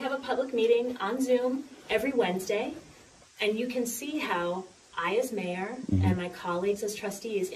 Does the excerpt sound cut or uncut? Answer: uncut